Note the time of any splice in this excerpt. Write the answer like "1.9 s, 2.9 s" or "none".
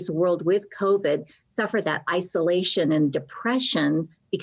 none